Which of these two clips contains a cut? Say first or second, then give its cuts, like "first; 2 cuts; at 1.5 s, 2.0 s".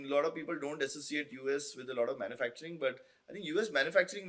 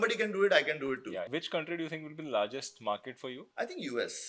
second; 2 cuts; at 1.2 s, 3.4 s